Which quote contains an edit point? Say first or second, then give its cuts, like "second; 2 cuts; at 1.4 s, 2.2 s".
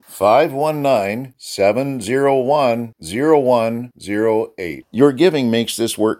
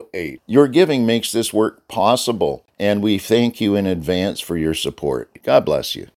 second; 2 cuts; at 2.7 s, 5.3 s